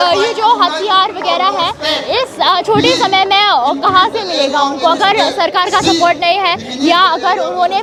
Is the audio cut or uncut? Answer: uncut